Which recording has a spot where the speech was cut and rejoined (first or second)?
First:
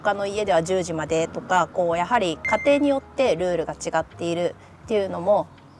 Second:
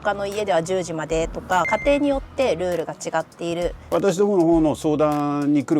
second